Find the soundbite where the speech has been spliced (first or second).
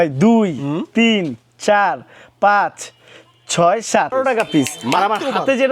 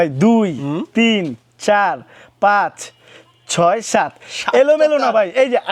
first